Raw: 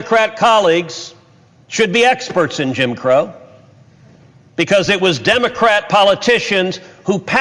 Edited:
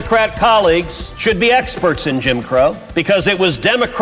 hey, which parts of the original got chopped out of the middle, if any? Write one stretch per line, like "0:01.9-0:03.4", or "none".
0:01.0-0:01.6
0:03.4-0:04.5